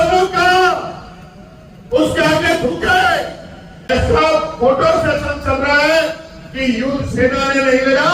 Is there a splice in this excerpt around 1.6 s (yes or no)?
no